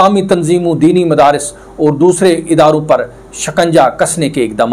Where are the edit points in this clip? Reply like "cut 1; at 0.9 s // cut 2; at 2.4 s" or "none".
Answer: none